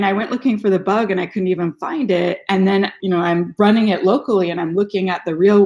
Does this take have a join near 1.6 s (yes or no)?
no